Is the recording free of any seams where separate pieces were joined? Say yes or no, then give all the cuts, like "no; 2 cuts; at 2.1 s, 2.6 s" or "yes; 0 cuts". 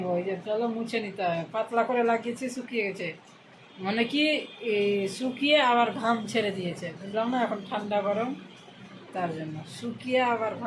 yes; 0 cuts